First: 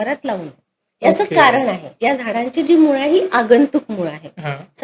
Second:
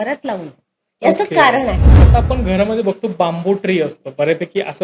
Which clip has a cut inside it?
second; 1 cut; at 1.9 s

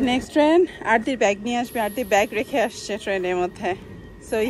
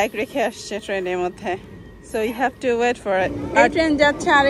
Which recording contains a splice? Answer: second; 1 cut; at 3.4 s

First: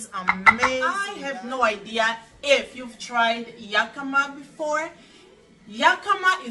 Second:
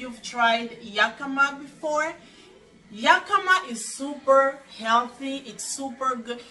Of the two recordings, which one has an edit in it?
first; 1 cut; at 1.3 s

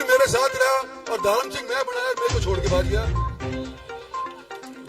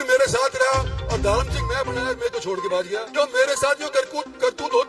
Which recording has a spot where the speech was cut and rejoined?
second; 1 cut; at 3.1 s

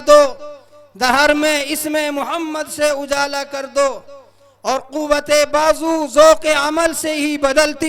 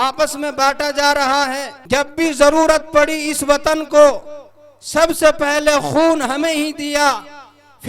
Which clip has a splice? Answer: second; 1 cut; at 1.7 s

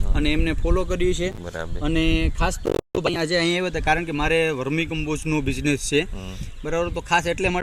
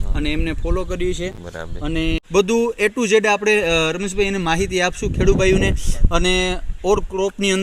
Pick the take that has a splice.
second; 1 cut; at 2.2 s

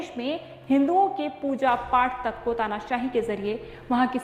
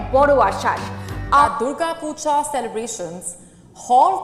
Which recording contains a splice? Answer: second; 1 cut; at 1.5 s

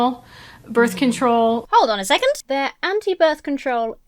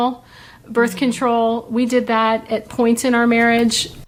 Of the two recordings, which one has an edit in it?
first; 2 cuts; at 1.6 s, 2.4 s

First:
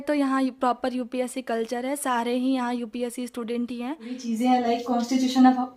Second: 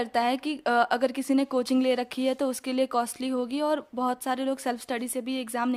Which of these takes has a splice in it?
first; 1 cut; at 4.3 s

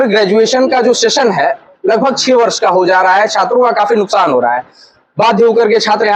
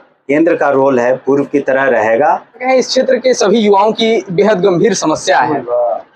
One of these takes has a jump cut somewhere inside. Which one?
second; 1 cut; at 2.6 s

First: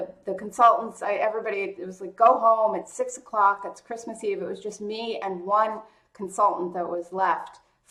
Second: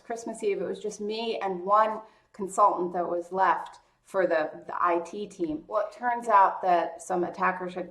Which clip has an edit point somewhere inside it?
second; 1 cut; at 5.9 s

